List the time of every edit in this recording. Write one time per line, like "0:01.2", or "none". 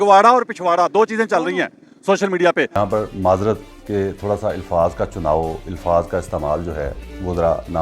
0:02.7